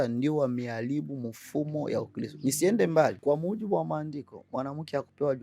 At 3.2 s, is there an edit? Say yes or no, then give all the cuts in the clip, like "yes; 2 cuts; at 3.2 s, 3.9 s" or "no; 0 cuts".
yes; 1 cut; at 3.2 s